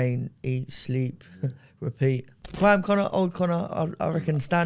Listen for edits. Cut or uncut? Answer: cut